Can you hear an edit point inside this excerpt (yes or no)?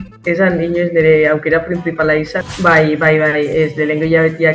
yes